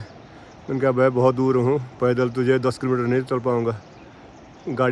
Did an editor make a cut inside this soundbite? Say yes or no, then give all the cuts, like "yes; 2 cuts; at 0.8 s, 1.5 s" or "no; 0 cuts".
no; 0 cuts